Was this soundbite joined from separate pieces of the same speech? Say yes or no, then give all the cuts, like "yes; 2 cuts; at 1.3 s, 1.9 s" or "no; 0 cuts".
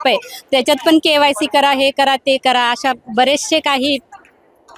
no; 0 cuts